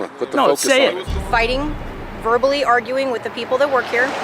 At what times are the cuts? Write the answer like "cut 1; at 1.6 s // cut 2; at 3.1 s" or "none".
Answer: cut 1; at 1.1 s